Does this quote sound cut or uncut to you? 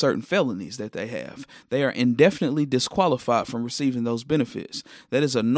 uncut